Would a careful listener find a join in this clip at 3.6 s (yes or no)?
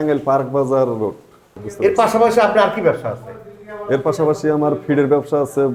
no